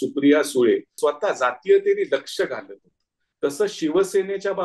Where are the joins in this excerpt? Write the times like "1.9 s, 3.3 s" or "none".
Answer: 0.9 s